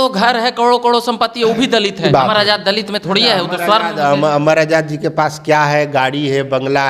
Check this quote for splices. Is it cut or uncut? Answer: cut